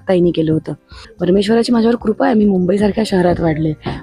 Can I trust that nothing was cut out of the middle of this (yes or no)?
no